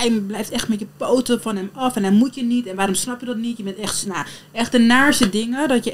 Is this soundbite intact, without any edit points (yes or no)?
yes